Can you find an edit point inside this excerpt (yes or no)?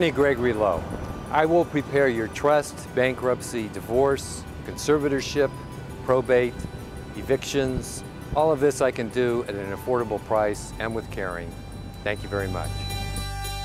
no